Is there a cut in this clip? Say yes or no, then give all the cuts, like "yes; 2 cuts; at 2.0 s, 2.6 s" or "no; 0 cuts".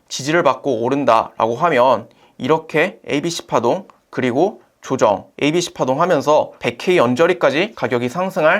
yes; 4 cuts; at 3.0 s, 5.3 s, 6.6 s, 7.8 s